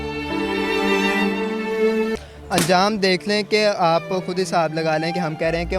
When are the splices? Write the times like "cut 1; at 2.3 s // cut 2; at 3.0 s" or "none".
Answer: cut 1; at 2.2 s